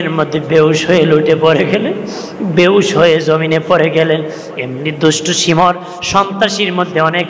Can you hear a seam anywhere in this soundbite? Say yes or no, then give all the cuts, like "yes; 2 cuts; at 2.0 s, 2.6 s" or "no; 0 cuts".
no; 0 cuts